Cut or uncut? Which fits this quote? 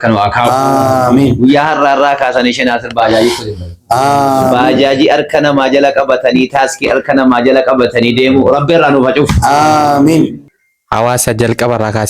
cut